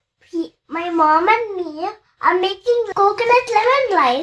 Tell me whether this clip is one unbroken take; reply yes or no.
no